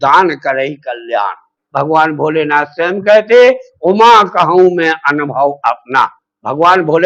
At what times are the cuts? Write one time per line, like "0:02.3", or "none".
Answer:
0:01.6